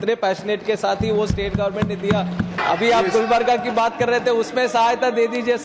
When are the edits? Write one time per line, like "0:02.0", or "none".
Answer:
0:02.6